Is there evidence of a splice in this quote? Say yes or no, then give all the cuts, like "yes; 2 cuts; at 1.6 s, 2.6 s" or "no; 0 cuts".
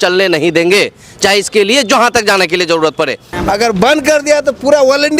yes; 1 cut; at 3.3 s